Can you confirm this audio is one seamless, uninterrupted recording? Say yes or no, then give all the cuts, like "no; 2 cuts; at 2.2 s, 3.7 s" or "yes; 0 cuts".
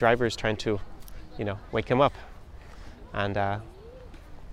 yes; 0 cuts